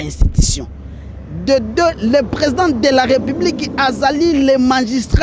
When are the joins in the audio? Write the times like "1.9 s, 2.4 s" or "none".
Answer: none